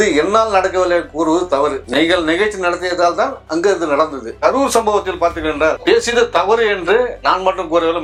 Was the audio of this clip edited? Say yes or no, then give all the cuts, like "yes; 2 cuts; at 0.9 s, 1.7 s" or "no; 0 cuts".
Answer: no; 0 cuts